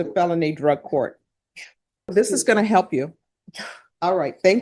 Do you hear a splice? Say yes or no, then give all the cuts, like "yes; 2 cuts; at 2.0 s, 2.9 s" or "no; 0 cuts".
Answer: yes; 1 cut; at 2.1 s